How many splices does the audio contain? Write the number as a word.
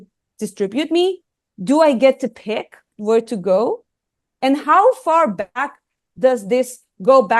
one